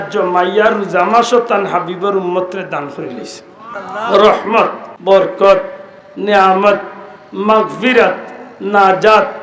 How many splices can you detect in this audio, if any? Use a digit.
2